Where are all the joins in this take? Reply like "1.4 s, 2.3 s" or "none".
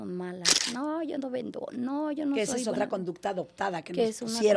none